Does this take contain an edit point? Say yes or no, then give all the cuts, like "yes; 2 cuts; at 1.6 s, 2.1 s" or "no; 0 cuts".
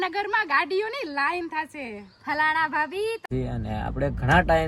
yes; 1 cut; at 3.3 s